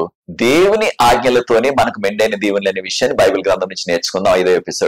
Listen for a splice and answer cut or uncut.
uncut